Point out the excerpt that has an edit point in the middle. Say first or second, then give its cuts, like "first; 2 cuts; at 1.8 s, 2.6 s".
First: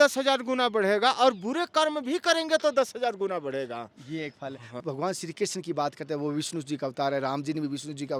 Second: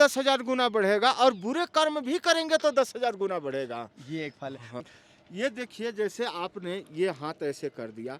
second; 1 cut; at 4.8 s